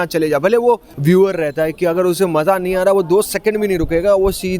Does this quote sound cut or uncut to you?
cut